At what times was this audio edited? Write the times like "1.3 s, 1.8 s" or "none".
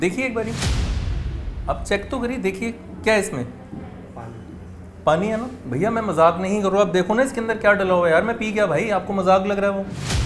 5.6 s